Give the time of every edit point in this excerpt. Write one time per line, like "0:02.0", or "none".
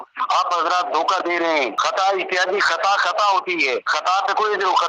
0:01.7
0:03.9